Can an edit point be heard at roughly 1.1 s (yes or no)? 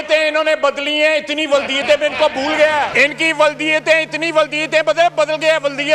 no